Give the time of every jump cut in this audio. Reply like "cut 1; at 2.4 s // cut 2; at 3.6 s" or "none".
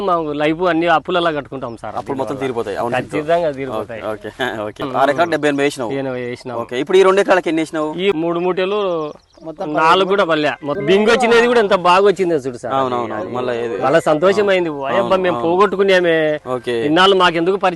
cut 1; at 4.9 s // cut 2; at 8.2 s // cut 3; at 10.7 s